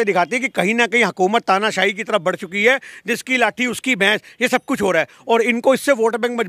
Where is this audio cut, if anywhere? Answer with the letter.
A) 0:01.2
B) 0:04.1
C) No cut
C